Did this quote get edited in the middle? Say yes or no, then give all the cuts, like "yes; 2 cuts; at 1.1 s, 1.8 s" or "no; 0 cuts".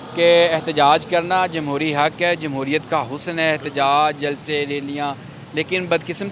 no; 0 cuts